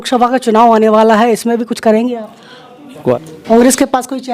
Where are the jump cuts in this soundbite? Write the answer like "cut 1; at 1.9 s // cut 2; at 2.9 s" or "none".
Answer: cut 1; at 3.2 s